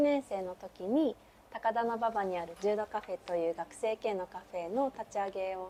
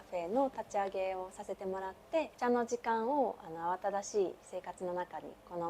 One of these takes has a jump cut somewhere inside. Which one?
second; 1 cut; at 2.3 s

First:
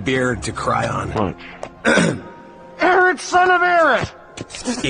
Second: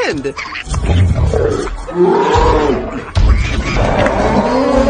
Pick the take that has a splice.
second; 1 cut; at 3.7 s

